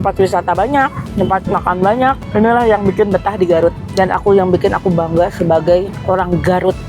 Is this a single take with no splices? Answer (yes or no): no